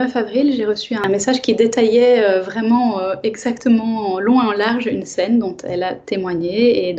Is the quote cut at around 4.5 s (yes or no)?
no